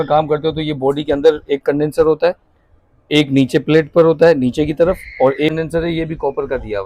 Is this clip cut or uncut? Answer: cut